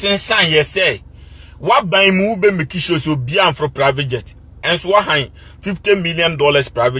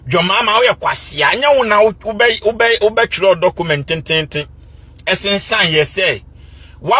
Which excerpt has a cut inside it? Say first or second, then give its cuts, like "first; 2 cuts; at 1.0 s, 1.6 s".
first; 1 cut; at 4.5 s